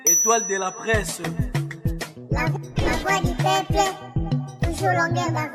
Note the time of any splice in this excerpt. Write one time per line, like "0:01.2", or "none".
none